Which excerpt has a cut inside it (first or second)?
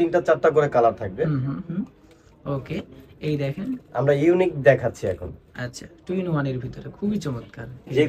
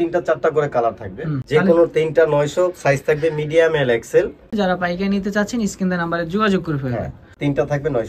second